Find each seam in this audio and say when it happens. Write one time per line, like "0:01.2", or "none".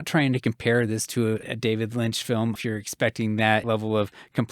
0:01.4
0:02.6
0:03.6